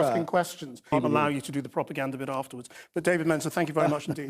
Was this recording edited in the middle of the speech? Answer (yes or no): yes